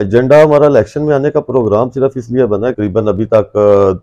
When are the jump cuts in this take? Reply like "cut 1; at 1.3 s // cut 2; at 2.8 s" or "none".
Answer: cut 1; at 2.8 s